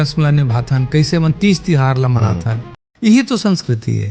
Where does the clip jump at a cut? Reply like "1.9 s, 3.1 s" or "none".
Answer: none